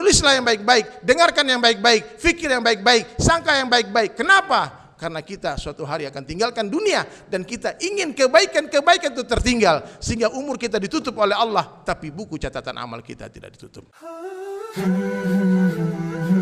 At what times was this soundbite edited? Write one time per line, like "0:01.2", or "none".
0:13.9